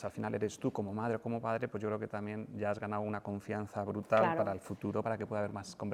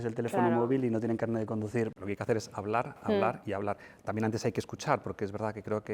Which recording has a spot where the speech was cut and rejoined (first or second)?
second